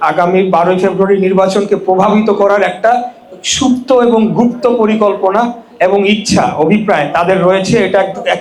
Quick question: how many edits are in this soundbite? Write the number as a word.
zero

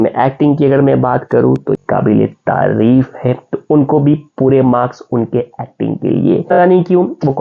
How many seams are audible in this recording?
two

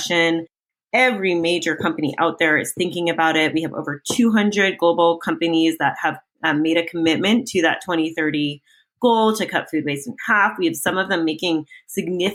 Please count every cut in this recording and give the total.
zero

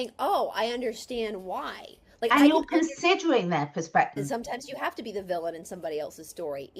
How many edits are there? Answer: one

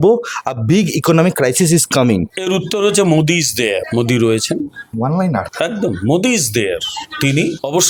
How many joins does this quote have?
zero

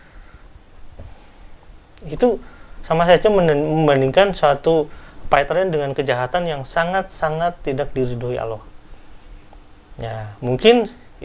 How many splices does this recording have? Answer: zero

